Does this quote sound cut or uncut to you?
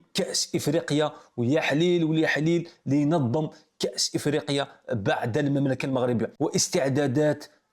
cut